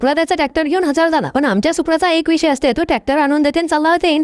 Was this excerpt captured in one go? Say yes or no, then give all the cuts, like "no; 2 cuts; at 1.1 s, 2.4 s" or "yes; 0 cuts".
yes; 0 cuts